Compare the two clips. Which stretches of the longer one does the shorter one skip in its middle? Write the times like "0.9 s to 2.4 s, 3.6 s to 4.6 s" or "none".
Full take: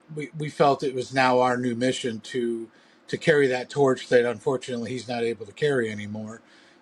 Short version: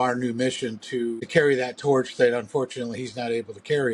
2.6 s to 3.1 s